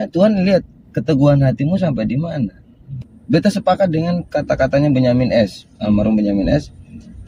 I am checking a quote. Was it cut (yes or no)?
yes